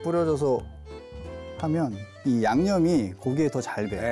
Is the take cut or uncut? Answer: uncut